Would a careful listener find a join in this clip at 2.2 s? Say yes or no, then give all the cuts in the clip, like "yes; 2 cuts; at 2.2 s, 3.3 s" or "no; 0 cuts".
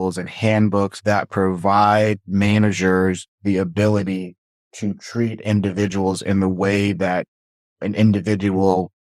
no; 1 cut; at 0.9 s